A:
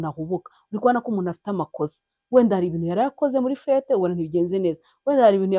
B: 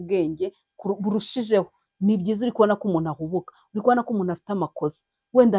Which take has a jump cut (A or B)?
B